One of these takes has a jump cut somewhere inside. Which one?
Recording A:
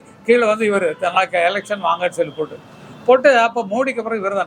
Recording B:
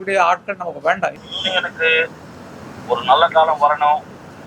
B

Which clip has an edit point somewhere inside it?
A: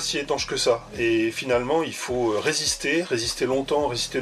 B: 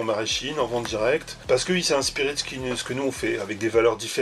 B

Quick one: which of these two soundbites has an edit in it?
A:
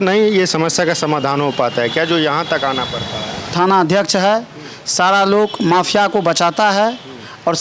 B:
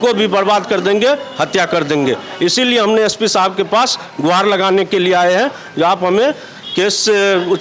A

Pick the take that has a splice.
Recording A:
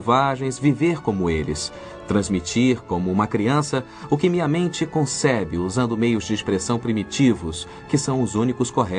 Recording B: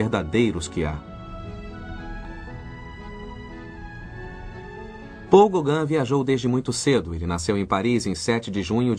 A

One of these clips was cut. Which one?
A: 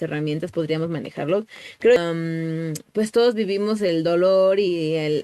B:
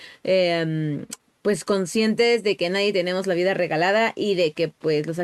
A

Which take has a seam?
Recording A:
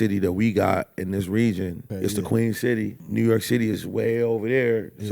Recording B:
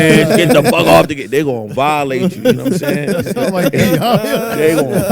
A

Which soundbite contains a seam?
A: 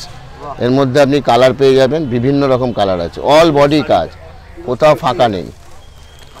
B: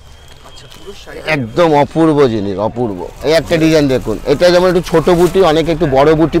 B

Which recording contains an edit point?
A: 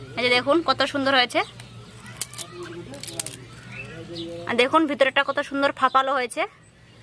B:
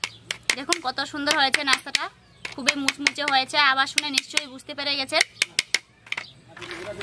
A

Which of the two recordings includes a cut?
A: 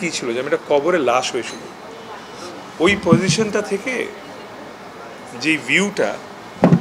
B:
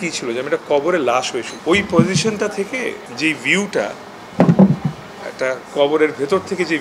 B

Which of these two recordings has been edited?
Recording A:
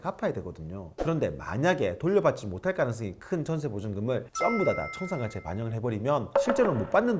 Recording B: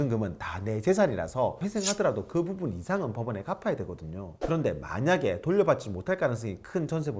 B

